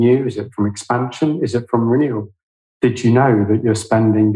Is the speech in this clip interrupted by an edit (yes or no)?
no